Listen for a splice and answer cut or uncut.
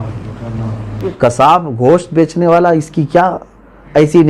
cut